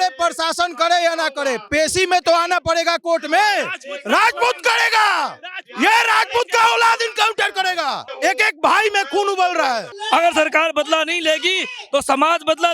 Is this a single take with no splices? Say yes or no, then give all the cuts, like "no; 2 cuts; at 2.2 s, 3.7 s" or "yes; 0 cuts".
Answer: no; 2 cuts; at 8.1 s, 9.9 s